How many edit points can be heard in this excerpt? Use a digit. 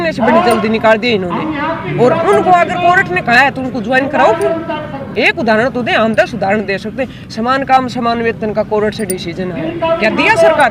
0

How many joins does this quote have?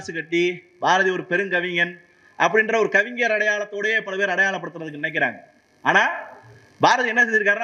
0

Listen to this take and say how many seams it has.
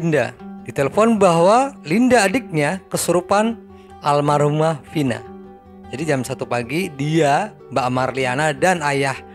0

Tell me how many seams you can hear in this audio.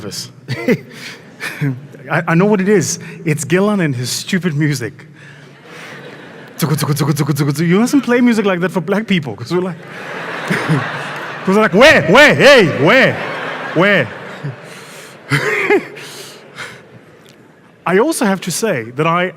0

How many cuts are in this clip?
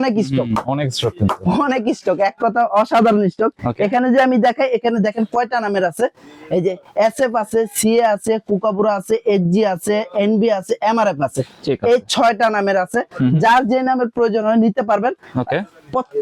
0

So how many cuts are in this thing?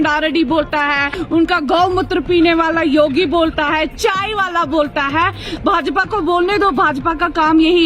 1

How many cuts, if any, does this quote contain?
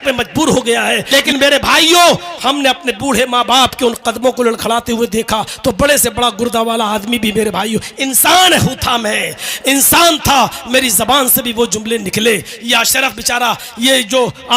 1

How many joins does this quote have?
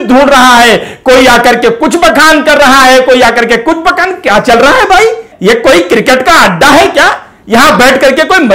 0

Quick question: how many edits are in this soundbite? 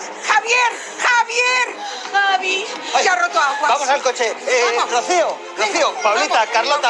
0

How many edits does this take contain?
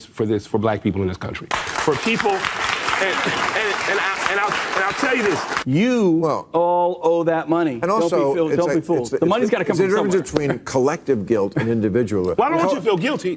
1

